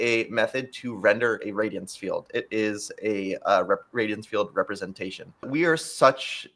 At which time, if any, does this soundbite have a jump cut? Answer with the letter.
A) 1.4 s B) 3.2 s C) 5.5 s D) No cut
C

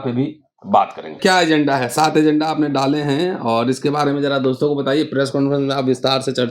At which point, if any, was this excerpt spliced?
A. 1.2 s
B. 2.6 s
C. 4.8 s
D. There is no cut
A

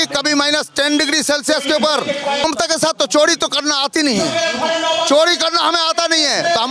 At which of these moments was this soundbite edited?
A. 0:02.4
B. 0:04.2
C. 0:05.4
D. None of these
A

